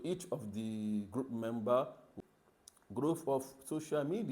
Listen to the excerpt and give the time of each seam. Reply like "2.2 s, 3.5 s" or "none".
2.1 s